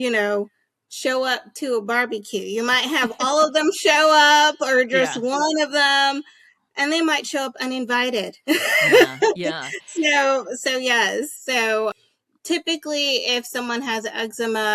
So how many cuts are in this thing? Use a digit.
0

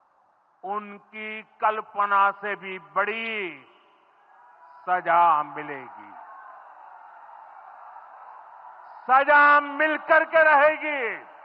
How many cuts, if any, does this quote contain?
0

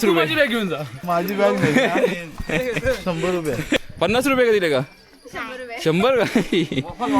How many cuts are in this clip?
2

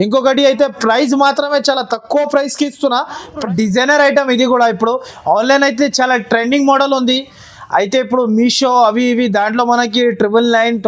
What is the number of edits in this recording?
1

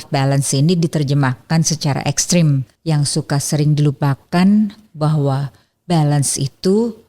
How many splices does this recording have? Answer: 1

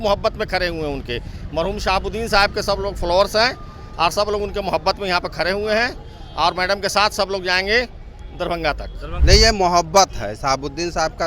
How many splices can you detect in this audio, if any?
1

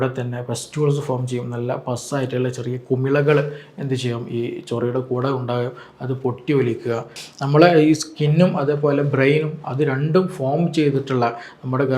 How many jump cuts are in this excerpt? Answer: 1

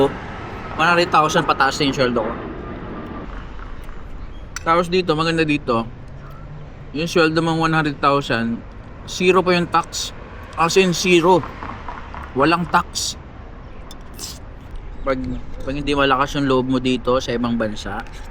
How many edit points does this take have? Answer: 2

